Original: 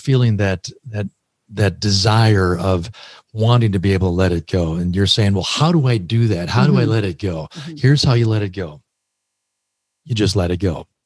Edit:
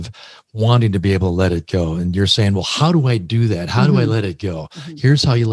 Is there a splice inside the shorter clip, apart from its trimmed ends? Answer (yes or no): no